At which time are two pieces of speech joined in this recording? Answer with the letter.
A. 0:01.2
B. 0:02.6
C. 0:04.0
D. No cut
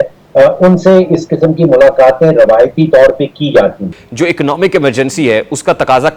C